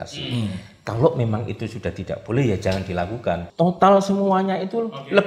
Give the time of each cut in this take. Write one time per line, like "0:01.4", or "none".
0:03.5